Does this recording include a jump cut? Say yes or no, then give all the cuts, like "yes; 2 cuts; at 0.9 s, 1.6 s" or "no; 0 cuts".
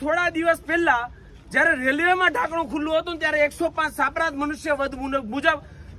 no; 0 cuts